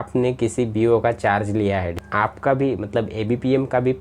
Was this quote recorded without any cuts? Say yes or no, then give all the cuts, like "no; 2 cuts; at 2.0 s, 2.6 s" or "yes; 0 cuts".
no; 1 cut; at 2.0 s